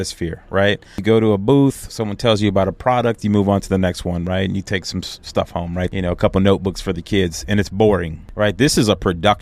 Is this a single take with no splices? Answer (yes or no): no